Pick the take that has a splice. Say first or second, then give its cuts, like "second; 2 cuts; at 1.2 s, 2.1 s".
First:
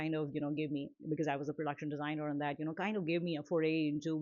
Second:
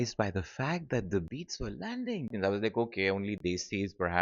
second; 1 cut; at 2.3 s